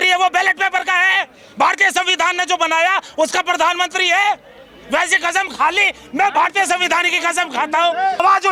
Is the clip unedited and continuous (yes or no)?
yes